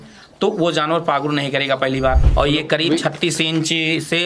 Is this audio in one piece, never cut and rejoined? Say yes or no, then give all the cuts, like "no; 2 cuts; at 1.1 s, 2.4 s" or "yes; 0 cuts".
no; 1 cut; at 2.2 s